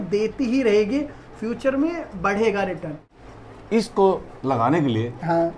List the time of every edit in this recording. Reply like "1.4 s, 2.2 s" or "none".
3.1 s